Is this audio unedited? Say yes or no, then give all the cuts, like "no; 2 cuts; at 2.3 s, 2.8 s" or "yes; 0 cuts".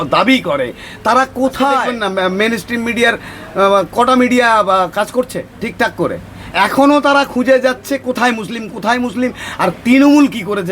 no; 1 cut; at 1.9 s